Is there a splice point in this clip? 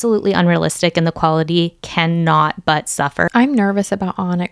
yes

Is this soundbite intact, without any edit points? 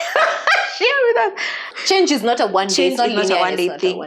no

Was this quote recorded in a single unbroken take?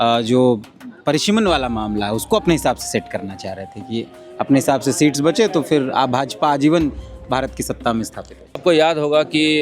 no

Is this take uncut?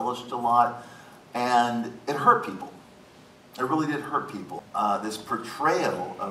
no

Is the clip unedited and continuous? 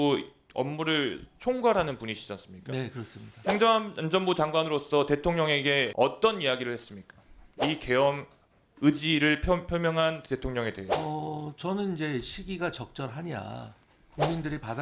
no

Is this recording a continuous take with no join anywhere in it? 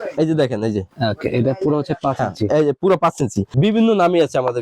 no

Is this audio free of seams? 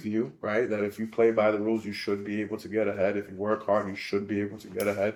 yes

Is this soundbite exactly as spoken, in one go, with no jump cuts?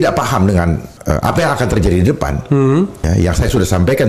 no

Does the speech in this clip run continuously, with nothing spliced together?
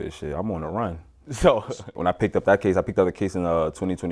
no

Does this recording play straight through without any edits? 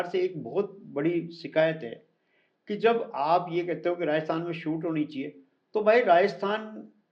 yes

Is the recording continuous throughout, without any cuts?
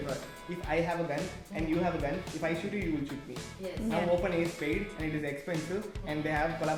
yes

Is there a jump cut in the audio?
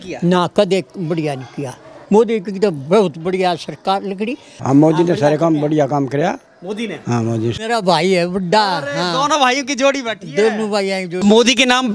yes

